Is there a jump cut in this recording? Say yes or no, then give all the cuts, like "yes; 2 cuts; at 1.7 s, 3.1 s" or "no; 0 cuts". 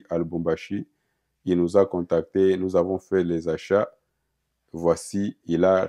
no; 0 cuts